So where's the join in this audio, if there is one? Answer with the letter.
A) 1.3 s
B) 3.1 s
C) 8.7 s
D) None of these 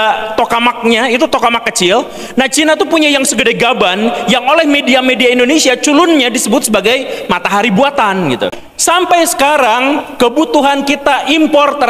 C